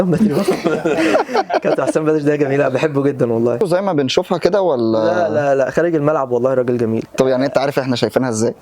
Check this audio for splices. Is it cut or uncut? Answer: cut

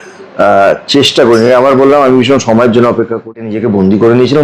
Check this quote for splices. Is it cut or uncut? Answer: cut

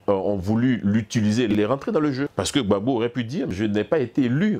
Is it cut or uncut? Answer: cut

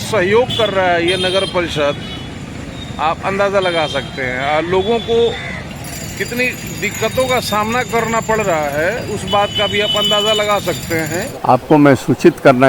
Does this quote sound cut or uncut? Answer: uncut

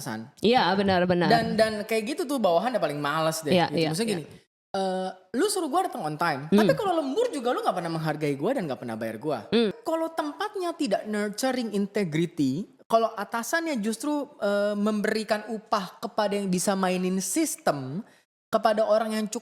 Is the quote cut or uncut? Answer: cut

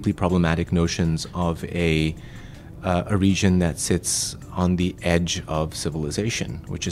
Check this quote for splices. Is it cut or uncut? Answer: uncut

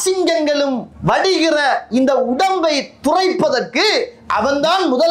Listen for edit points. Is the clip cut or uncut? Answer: cut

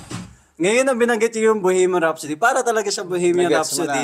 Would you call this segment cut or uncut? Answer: uncut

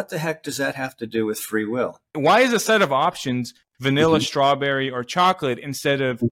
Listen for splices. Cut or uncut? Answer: cut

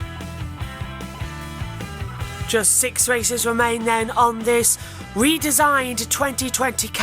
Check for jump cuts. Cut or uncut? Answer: cut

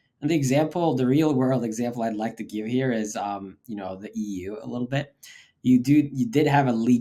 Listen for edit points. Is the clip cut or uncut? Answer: uncut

